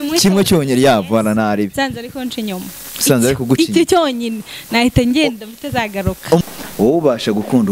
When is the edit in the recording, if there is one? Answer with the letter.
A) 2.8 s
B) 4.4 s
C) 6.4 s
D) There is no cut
C